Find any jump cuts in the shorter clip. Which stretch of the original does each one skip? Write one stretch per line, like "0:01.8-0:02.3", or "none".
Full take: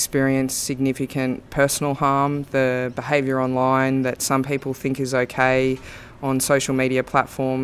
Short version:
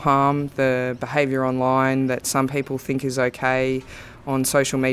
none